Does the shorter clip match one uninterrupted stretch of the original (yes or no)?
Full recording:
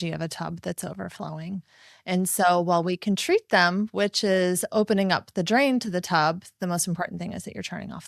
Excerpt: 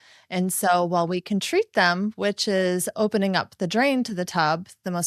yes